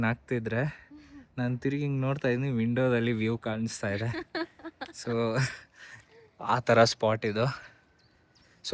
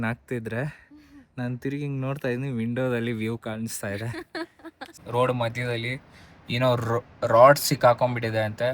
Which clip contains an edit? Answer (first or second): second